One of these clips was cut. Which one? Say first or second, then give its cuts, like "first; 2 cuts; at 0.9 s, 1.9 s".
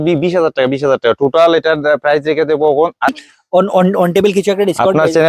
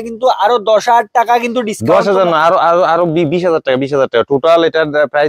first; 1 cut; at 3.1 s